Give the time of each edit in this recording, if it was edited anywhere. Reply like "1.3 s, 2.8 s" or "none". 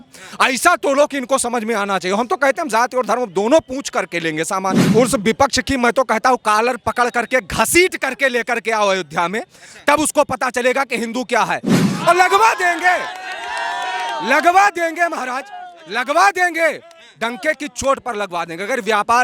4.8 s, 11.9 s

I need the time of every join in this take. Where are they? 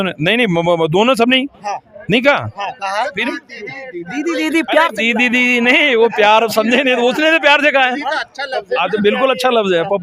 none

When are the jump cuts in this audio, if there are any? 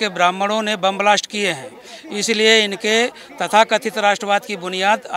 none

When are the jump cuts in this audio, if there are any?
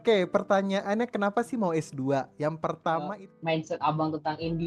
3.2 s

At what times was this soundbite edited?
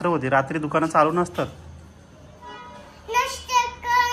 none

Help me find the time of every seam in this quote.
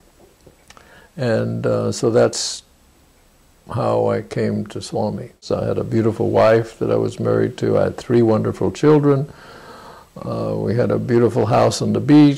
5.4 s

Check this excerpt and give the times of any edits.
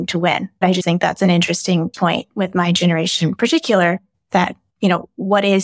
0.8 s, 1.9 s, 4.1 s

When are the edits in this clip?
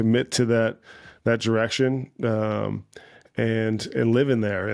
none

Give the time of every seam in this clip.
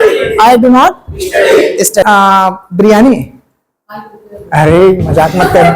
2.0 s

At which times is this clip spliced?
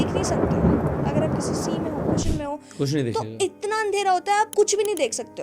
4.5 s

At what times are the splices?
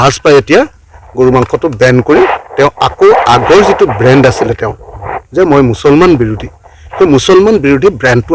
none

